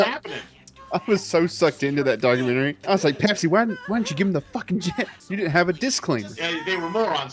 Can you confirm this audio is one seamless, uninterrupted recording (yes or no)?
no